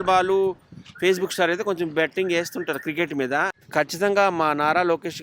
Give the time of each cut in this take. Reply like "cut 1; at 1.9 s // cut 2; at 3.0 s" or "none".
cut 1; at 3.5 s